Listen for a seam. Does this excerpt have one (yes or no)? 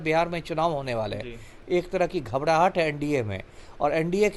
yes